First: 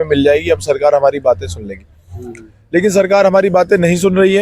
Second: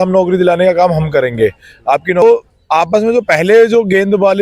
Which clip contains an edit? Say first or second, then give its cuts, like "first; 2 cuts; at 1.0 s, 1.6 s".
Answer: second; 1 cut; at 2.2 s